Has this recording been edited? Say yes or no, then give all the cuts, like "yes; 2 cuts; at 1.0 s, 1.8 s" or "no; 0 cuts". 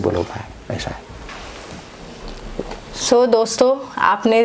no; 0 cuts